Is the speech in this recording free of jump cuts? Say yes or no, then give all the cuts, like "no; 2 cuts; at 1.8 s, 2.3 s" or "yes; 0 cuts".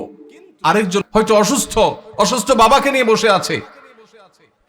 no; 1 cut; at 1.0 s